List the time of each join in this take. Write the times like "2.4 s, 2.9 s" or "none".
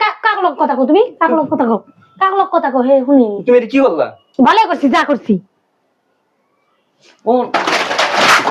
none